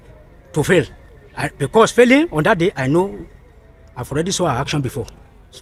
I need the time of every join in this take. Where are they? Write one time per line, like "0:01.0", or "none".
none